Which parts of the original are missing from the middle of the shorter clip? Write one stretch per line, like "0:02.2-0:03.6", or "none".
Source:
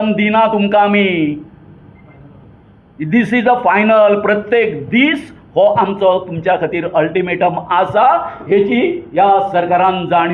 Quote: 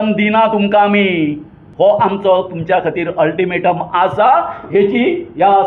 0:01.6-0:05.3